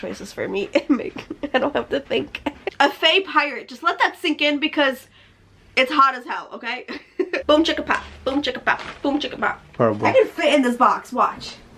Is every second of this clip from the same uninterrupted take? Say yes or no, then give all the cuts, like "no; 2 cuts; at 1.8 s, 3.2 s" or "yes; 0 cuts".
no; 3 cuts; at 2.6 s, 7.4 s, 9.6 s